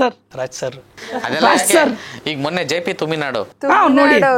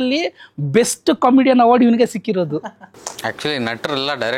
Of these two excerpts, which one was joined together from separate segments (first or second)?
second